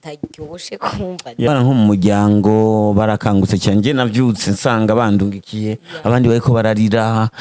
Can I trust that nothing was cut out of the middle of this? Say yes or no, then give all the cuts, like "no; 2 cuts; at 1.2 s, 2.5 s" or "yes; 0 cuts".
no; 1 cut; at 1.5 s